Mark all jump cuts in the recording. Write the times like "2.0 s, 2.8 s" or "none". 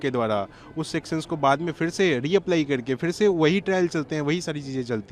none